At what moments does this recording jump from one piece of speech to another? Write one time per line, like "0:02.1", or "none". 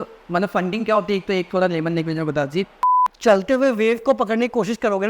0:02.8